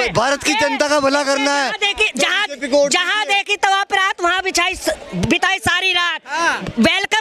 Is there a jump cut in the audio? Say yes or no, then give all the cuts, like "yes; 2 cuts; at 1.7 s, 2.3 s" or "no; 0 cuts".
no; 0 cuts